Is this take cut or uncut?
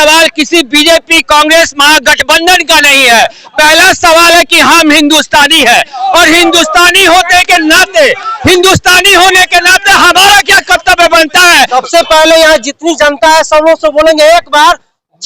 cut